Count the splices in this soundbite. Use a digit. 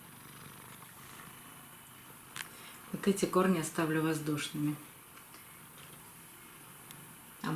1